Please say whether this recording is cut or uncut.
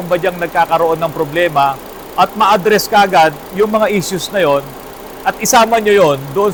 uncut